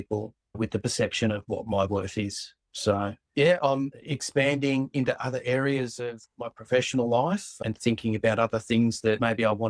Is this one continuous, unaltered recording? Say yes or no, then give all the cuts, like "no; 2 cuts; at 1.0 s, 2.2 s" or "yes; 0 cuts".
no; 1 cut; at 3.2 s